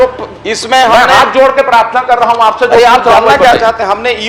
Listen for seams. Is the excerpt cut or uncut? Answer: uncut